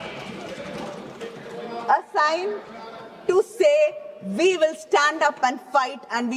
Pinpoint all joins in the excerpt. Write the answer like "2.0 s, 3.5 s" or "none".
none